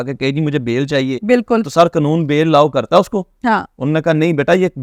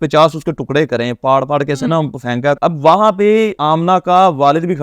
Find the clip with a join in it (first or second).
second